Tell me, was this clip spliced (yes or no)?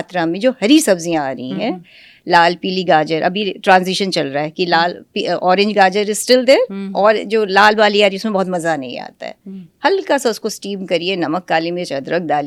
no